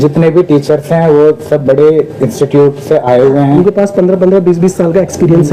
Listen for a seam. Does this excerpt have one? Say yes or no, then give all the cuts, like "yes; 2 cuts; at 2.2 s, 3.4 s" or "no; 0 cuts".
yes; 1 cut; at 3.6 s